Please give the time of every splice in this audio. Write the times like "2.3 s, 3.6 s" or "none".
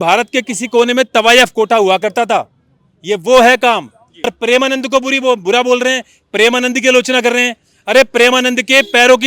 4.3 s